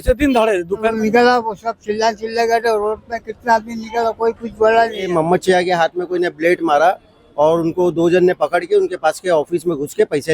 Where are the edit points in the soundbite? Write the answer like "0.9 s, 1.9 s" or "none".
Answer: 1.0 s, 5.1 s